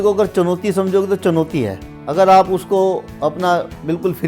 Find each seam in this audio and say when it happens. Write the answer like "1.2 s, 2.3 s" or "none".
none